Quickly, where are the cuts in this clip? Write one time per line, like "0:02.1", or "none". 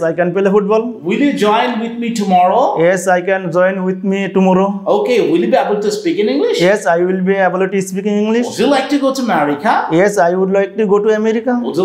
none